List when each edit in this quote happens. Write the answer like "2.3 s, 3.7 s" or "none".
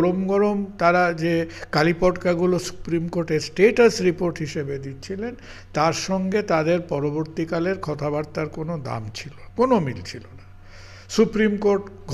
none